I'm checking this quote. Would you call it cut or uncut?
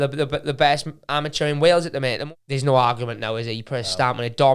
cut